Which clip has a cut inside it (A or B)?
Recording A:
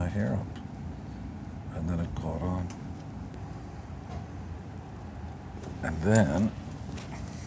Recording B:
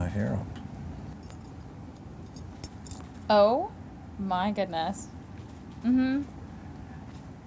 B